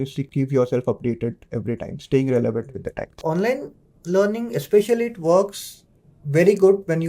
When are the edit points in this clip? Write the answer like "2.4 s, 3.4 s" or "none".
3.1 s

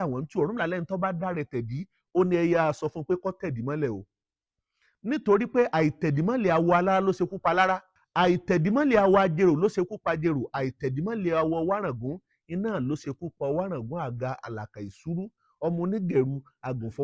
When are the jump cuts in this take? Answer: none

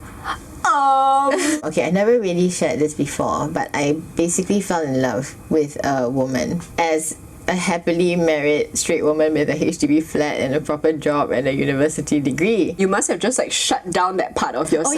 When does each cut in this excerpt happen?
1.6 s, 6.7 s, 12.8 s

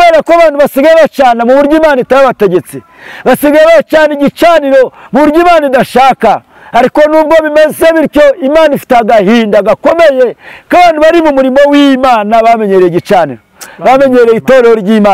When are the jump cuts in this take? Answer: none

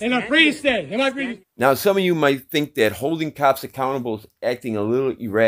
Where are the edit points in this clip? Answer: none

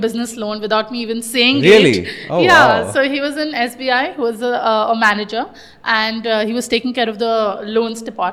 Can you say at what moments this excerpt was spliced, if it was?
none

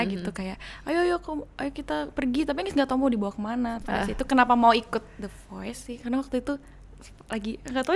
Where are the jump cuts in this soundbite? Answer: 3.8 s, 5.9 s

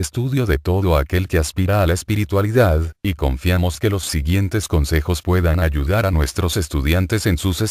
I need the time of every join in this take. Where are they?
none

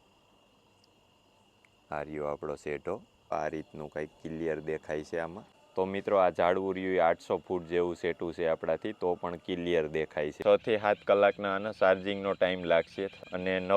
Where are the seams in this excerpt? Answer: 3.3 s, 10.4 s

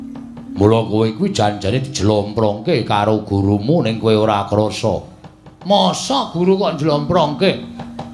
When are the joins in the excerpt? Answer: none

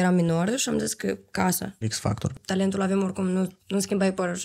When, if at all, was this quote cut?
2.1 s

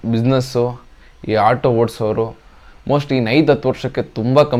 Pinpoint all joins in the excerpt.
none

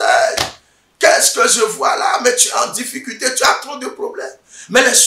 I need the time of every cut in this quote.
none

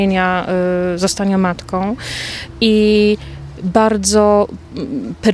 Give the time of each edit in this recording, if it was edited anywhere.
none

